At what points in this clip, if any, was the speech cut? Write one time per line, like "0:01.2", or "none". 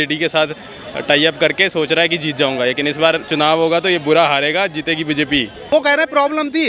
0:05.7